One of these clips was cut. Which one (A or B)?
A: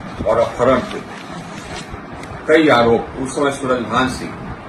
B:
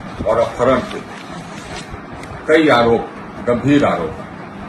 A